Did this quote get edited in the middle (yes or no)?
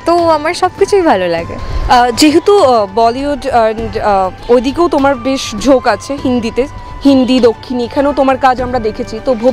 no